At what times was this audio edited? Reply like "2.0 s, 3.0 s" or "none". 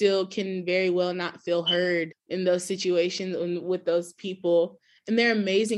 2.2 s